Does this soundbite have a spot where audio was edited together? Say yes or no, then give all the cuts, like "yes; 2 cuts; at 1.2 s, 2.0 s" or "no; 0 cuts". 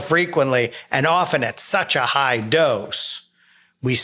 no; 0 cuts